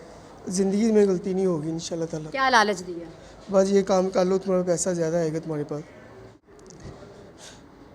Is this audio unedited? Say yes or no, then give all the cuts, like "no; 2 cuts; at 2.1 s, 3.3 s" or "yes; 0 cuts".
no; 1 cut; at 6.4 s